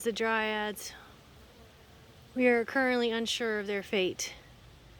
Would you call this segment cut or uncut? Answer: uncut